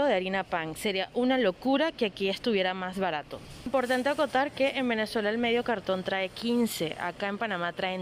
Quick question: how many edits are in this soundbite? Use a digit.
1